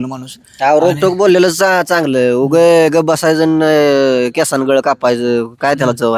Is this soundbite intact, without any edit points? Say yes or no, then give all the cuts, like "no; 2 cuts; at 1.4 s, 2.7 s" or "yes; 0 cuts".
yes; 0 cuts